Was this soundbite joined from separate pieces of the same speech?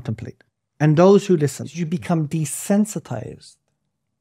yes; 1 cut; at 1.8 s

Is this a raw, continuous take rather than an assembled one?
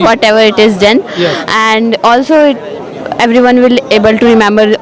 yes; 0 cuts

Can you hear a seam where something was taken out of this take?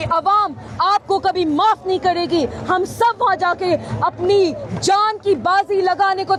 no; 0 cuts

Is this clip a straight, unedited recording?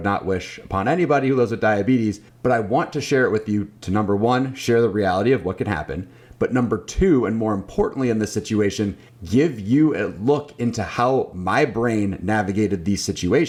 yes; 0 cuts

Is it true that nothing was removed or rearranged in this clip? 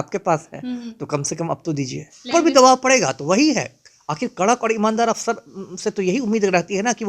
no; 1 cut; at 2.3 s

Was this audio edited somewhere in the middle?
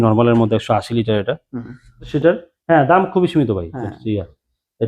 yes; 1 cut; at 2.1 s

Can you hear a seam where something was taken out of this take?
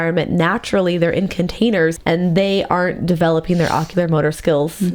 yes; 1 cut; at 2.0 s

